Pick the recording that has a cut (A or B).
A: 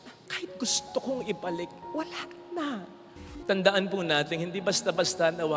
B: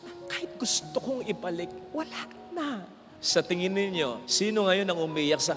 A